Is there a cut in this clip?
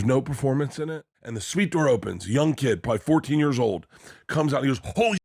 yes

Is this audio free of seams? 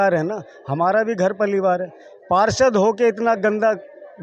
yes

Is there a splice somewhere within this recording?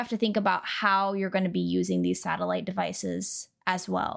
no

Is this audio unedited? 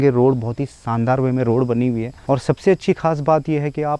no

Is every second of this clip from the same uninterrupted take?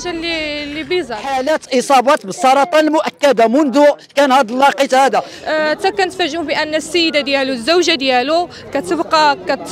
no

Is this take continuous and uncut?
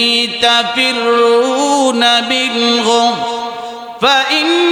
yes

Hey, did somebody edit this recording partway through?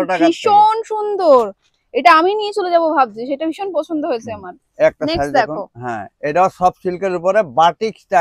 no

